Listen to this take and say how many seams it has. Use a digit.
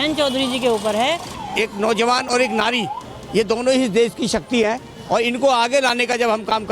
1